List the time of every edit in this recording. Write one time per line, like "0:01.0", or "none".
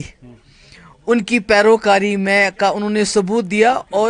none